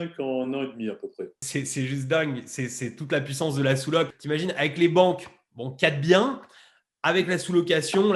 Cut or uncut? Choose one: cut